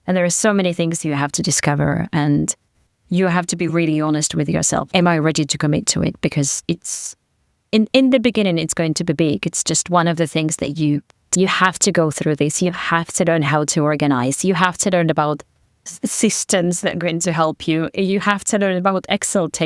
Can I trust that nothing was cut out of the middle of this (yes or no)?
yes